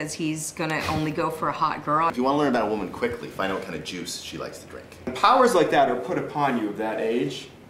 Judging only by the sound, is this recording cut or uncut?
cut